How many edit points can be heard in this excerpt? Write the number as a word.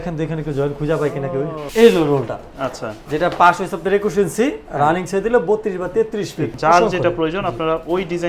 two